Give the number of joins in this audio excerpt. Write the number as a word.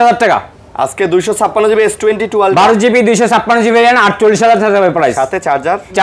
zero